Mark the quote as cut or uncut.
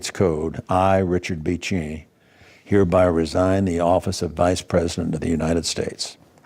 cut